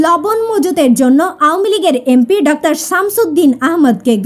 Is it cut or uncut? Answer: uncut